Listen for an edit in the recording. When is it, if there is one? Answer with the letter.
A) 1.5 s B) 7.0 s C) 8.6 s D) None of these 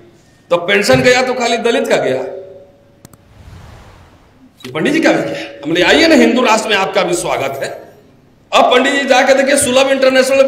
D